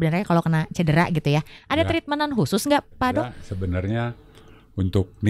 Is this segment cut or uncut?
cut